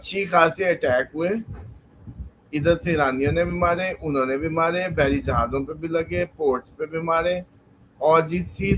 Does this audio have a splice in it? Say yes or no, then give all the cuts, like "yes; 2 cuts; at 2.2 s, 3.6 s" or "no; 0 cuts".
no; 0 cuts